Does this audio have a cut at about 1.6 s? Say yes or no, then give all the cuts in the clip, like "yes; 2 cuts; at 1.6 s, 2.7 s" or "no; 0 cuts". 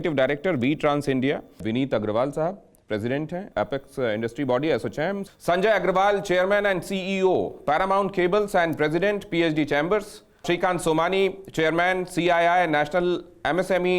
yes; 1 cut; at 1.6 s